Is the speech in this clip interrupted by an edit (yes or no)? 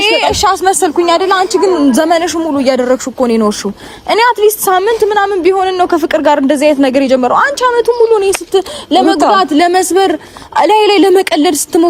no